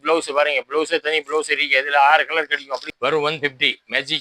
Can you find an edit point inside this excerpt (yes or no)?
yes